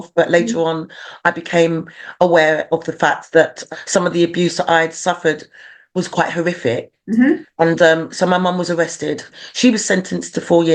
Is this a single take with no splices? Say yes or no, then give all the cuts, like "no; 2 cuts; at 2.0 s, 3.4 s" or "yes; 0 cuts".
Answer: no; 2 cuts; at 3.6 s, 9.3 s